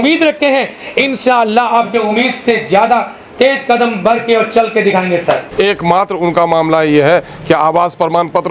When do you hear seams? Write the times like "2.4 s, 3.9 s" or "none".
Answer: 5.5 s

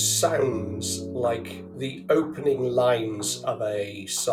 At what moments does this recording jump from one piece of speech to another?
none

